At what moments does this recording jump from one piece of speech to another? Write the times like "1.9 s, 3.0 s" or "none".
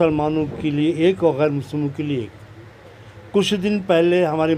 none

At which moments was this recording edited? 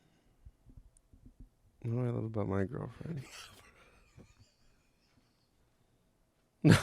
none

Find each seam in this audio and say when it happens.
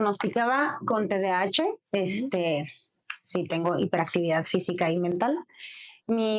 none

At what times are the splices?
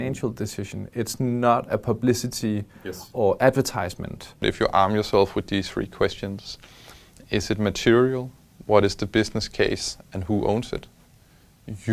4.4 s

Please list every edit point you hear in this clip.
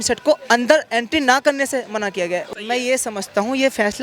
2.5 s

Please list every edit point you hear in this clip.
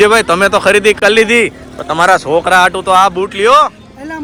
none

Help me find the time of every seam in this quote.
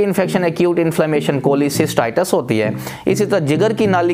none

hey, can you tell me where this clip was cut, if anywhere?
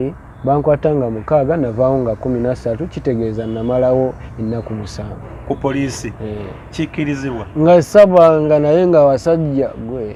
none

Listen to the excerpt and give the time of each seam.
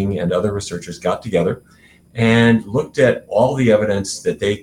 none

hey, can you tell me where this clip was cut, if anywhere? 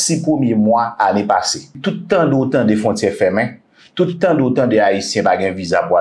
1.8 s

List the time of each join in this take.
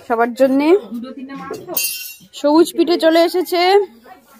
none

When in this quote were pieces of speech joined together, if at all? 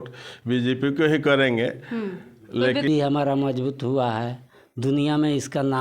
2.9 s

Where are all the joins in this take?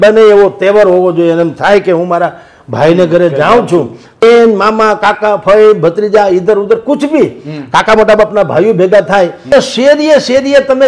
4.2 s, 9.5 s

